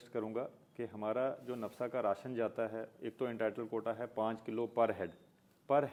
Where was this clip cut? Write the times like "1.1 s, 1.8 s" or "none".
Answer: none